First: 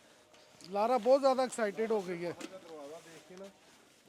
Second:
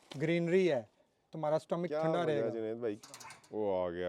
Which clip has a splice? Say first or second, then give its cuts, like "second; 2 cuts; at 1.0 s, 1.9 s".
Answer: second; 1 cut; at 3.0 s